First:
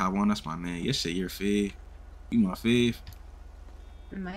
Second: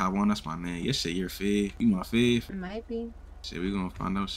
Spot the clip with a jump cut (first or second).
second